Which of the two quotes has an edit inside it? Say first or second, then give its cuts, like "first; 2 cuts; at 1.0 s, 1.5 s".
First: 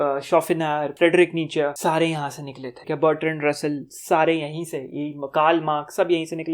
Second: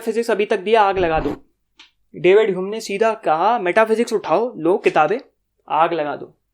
first; 3 cuts; at 0.9 s, 1.8 s, 2.7 s